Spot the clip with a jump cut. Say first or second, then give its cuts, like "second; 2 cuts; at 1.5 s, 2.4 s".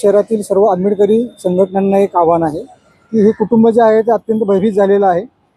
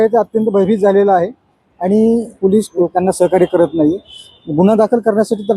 second; 1 cut; at 2.6 s